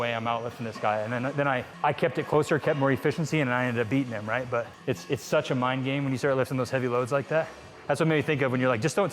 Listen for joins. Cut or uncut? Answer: cut